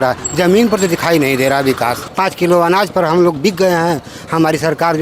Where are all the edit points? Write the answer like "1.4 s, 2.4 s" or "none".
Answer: 2.1 s